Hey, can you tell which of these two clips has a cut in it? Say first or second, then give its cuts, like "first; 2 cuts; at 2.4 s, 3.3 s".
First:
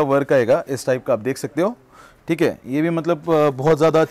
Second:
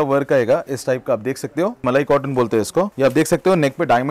second; 2 cuts; at 1.8 s, 2.9 s